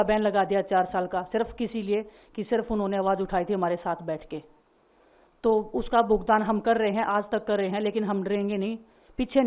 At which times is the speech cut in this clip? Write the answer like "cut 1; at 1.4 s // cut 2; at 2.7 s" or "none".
none